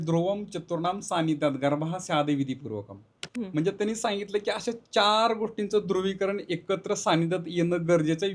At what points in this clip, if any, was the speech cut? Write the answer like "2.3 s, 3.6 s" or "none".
none